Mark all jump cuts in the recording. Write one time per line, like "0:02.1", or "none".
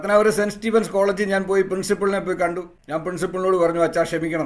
0:02.7